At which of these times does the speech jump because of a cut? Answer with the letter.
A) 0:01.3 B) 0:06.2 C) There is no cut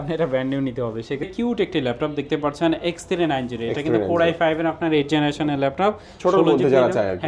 A